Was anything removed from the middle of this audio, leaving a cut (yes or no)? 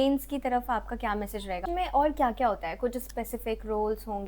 yes